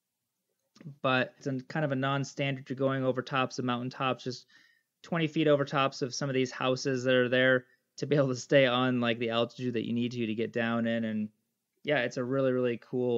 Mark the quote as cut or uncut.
cut